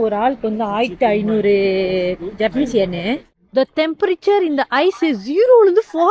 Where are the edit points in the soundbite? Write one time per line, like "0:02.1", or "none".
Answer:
0:03.3